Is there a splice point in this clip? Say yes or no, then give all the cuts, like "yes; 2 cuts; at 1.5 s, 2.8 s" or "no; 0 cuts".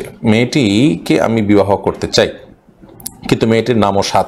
no; 0 cuts